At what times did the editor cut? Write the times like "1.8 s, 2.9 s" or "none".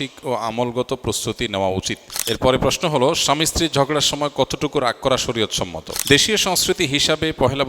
2.2 s, 6.0 s

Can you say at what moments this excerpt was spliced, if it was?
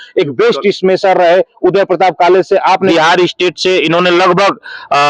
2.9 s

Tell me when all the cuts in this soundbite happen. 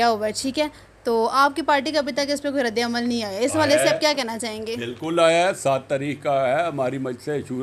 none

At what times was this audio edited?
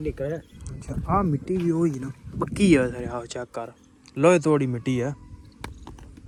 none

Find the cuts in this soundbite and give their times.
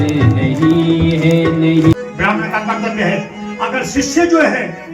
1.9 s

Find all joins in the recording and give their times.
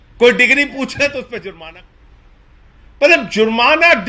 1.5 s

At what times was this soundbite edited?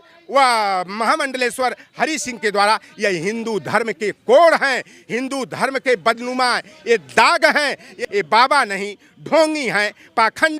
7.9 s

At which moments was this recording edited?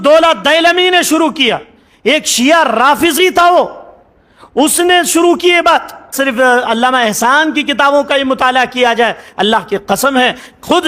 6.1 s

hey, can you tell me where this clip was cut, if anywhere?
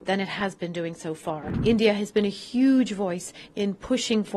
1.5 s

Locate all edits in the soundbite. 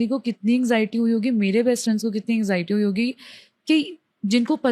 none

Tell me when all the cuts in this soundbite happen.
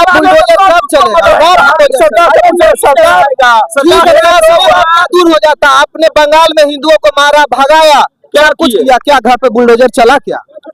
none

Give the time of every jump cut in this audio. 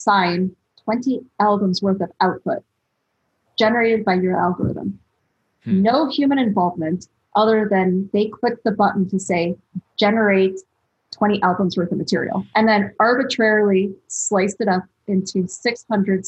12.5 s

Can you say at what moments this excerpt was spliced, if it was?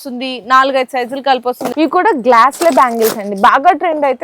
1.7 s

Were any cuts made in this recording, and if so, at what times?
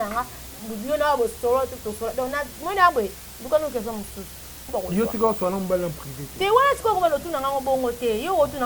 4.7 s

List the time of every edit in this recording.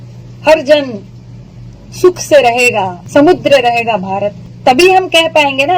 3.0 s, 4.4 s

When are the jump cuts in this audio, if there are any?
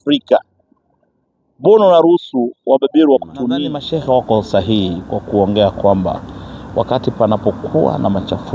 3.8 s

